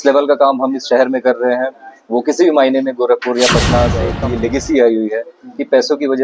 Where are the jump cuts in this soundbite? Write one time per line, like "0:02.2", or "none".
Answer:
0:04.1